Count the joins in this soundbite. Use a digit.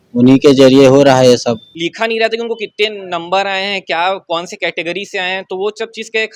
1